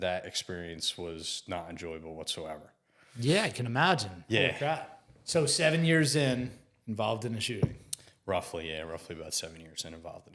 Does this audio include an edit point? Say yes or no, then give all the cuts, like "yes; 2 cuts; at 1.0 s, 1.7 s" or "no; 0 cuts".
no; 0 cuts